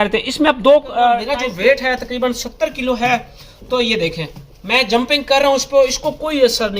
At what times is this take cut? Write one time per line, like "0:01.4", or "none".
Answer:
0:01.3